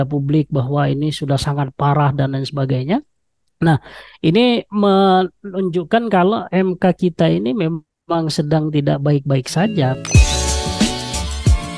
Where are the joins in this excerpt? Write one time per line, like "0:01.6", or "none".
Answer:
0:10.0